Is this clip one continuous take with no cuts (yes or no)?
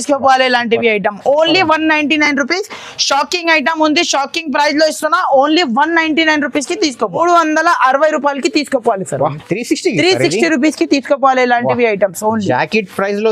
no